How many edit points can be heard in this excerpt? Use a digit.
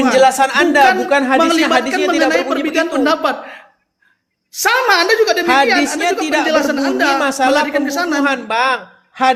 0